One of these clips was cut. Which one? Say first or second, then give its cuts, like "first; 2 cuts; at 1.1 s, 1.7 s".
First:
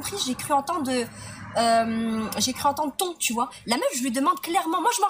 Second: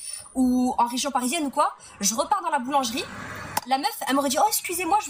second; 1 cut; at 1.9 s